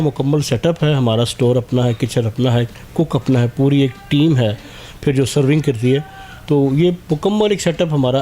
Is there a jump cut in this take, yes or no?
no